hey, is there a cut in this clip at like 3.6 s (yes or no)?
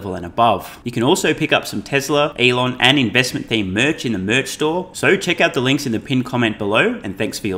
no